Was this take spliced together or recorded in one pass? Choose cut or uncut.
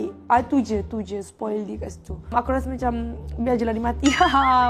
uncut